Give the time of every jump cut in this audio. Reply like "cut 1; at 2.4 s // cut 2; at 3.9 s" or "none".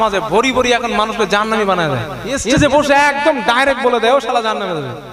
cut 1; at 2.4 s